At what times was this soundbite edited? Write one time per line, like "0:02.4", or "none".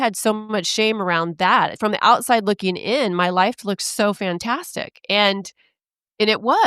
0:01.8